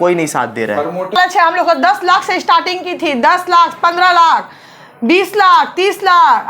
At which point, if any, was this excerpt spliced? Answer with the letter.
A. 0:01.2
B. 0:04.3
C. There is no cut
A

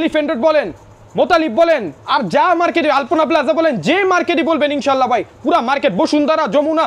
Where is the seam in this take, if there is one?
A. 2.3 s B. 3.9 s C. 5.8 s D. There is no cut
D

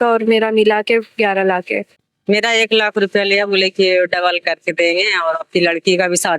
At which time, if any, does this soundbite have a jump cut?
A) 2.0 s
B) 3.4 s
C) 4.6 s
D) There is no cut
A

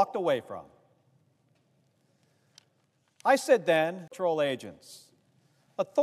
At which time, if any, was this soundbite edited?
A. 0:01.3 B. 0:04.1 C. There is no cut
C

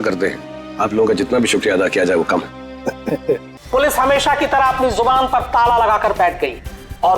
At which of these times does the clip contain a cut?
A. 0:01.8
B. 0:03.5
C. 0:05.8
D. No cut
B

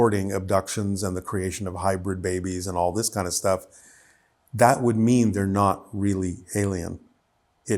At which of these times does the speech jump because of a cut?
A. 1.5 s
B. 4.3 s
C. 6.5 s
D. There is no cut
D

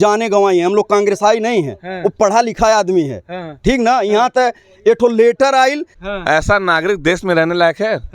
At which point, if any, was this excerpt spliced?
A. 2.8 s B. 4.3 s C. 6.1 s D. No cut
C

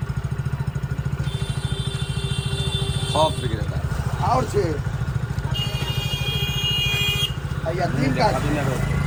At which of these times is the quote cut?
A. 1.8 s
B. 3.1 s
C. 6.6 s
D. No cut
D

